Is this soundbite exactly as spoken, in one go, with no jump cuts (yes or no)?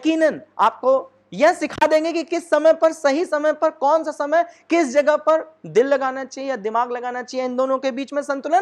yes